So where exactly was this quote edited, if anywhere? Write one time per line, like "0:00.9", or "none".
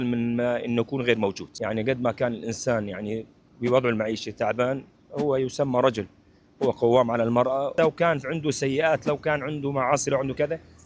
0:01.5
0:07.7